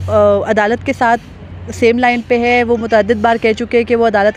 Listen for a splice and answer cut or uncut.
uncut